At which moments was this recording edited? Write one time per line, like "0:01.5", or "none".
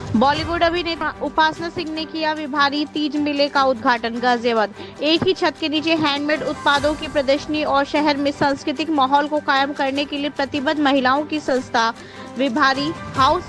none